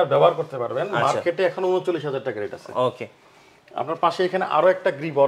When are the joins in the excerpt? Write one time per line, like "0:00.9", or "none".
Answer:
none